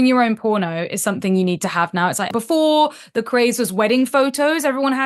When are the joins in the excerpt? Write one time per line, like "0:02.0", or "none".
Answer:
0:02.3